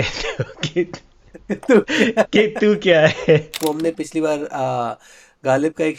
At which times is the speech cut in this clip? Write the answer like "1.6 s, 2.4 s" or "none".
3.6 s